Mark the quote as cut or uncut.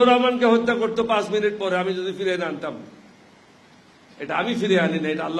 uncut